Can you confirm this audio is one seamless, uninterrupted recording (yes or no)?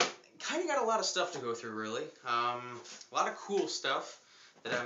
no